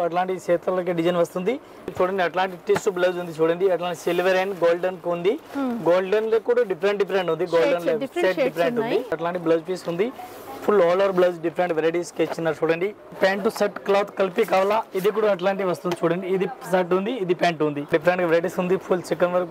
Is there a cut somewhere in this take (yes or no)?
yes